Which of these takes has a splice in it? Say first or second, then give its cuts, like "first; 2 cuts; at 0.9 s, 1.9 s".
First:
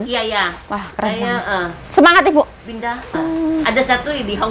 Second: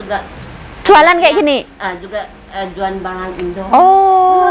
first; 1 cut; at 3.1 s